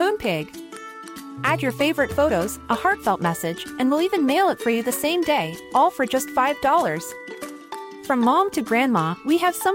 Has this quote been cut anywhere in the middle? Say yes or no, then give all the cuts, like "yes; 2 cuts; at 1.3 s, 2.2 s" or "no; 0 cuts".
no; 0 cuts